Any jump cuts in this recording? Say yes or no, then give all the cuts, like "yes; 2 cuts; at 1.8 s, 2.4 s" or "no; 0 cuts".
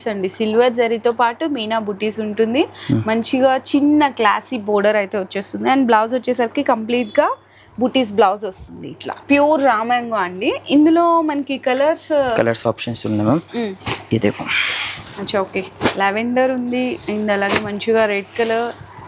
no; 0 cuts